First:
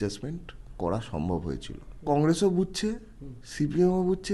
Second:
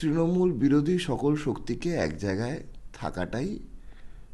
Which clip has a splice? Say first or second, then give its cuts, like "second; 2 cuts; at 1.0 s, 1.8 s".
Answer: first; 1 cut; at 2.0 s